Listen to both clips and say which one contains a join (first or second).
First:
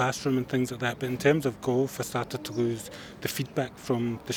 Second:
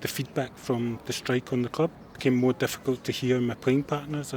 second